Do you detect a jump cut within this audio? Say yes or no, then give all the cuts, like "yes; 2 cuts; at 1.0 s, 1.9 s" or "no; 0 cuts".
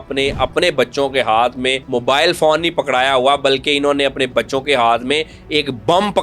yes; 1 cut; at 1.8 s